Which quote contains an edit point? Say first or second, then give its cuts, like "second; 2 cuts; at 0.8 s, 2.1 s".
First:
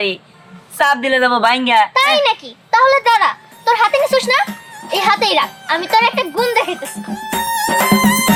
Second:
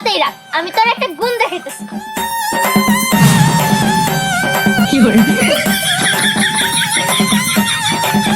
second; 1 cut; at 4.9 s